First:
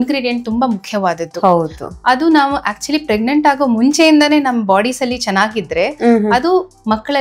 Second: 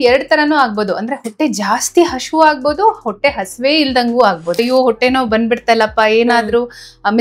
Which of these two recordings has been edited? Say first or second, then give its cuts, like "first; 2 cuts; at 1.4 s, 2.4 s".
second; 1 cut; at 4.6 s